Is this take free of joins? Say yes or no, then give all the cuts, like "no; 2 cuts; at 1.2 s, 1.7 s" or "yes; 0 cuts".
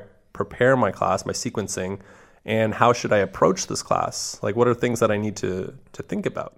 yes; 0 cuts